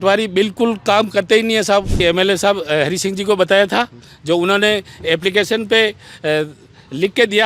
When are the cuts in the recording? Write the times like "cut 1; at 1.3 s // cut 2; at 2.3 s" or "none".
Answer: cut 1; at 2.0 s